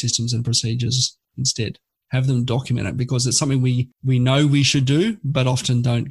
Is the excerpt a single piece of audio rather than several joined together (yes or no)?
no